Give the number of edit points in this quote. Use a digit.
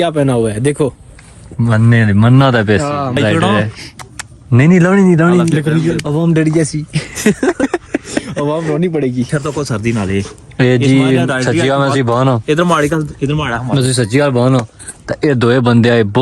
2